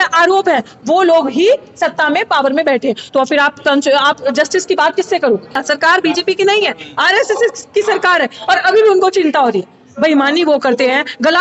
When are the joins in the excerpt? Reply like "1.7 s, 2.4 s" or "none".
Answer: 5.6 s